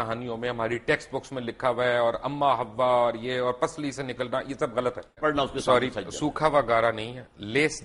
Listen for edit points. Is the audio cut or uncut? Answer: cut